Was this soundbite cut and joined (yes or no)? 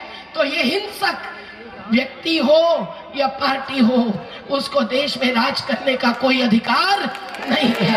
no